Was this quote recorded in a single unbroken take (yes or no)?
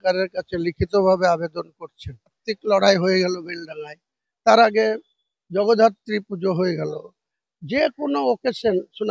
no